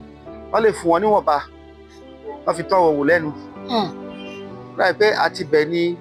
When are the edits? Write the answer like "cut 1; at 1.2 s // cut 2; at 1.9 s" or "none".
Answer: none